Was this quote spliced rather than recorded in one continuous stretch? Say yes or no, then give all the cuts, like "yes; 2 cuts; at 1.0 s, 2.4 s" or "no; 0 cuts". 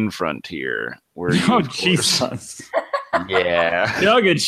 no; 0 cuts